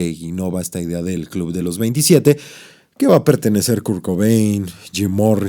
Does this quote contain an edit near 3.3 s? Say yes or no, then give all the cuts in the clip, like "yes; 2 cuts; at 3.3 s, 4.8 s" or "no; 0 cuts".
no; 0 cuts